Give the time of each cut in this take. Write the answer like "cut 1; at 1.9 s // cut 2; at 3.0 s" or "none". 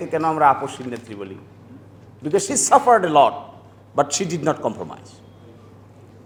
none